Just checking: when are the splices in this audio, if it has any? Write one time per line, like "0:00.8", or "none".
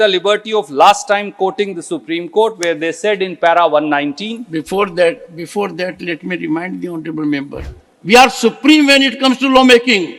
0:07.6